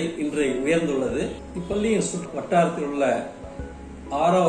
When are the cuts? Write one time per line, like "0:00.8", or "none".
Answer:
0:01.5
0:02.3